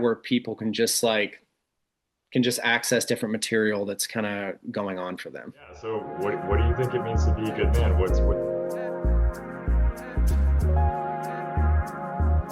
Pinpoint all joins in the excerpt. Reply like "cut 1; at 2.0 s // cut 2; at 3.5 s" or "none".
cut 1; at 5.9 s

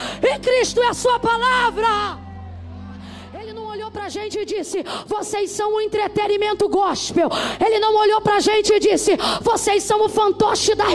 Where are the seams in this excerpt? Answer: cut 1; at 3.6 s

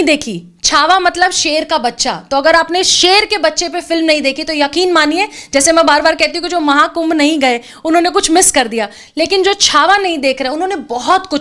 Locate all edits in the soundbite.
none

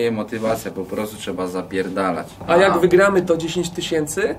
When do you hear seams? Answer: cut 1; at 2.3 s

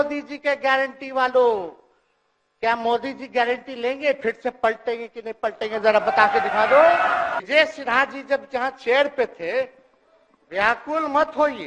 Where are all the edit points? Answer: cut 1; at 7.4 s

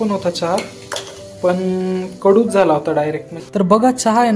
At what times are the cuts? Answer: cut 1; at 3.4 s

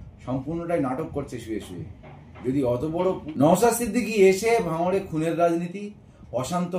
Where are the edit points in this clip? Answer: cut 1; at 3.2 s

